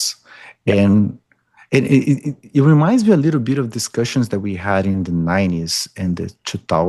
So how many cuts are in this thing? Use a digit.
0